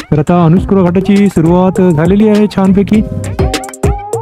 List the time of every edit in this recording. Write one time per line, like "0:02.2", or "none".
0:03.2